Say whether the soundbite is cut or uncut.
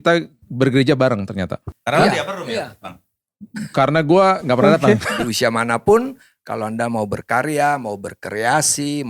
cut